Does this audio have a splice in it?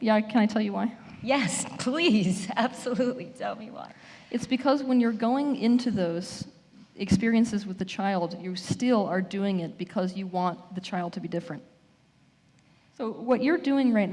yes; 1 cut; at 13.1 s

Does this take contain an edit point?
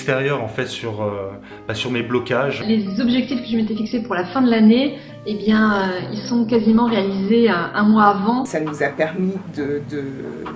yes; 2 cuts; at 2.6 s, 8.5 s

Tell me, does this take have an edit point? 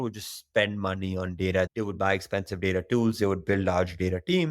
yes; 1 cut; at 1.7 s

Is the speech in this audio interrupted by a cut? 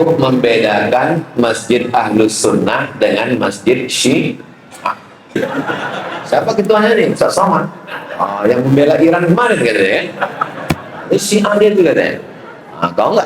yes; 1 cut; at 5.4 s

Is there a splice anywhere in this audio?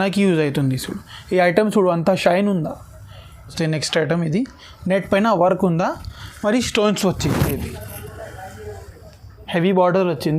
yes; 1 cut; at 3.5 s

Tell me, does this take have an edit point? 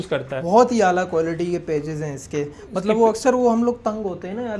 no; 0 cuts

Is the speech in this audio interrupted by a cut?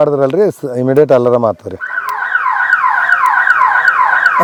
no; 0 cuts

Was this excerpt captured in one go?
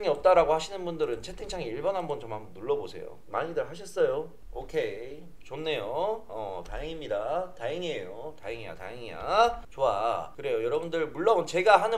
yes; 0 cuts

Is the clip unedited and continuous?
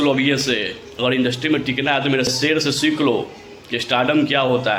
yes; 0 cuts

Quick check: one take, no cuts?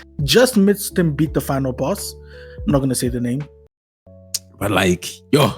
no; 1 cut; at 3.7 s

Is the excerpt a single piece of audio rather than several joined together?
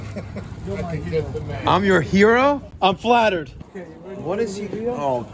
no; 2 cuts; at 2.7 s, 3.6 s

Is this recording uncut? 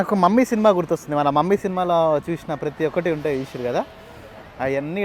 yes; 0 cuts

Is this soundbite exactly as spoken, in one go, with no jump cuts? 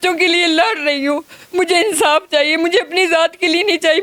yes; 0 cuts

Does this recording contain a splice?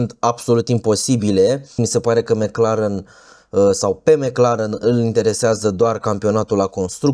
yes; 1 cut; at 1.7 s

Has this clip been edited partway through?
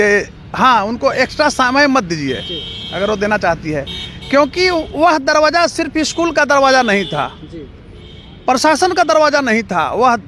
no; 0 cuts

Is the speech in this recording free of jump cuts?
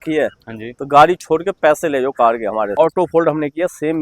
no; 1 cut; at 2.8 s

